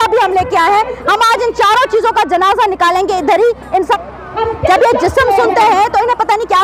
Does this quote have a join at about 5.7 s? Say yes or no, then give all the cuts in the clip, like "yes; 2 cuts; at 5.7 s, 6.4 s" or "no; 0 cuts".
no; 1 cut; at 4.0 s